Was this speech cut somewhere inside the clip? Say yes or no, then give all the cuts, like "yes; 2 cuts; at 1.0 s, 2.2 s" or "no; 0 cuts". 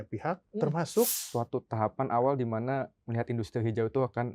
yes; 1 cut; at 1.2 s